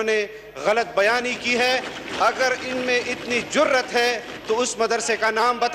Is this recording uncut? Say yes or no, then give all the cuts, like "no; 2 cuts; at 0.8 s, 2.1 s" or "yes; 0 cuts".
yes; 0 cuts